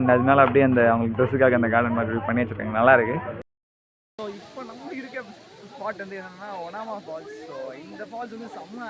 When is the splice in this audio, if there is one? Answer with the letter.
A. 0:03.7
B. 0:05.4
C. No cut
A